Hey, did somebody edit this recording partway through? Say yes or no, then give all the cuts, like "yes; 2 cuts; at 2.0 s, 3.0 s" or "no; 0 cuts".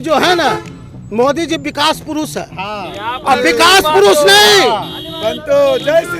no; 0 cuts